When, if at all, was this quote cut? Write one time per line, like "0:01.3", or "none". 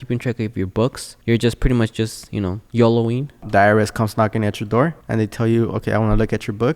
0:01.1
0:02.6
0:03.4
0:05.0